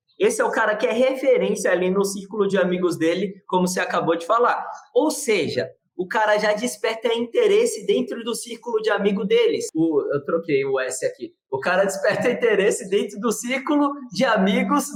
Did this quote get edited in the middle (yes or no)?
no